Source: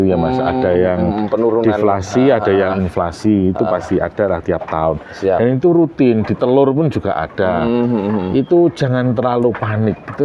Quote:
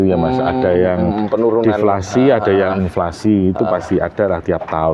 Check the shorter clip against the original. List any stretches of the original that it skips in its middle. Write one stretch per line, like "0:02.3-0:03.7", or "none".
none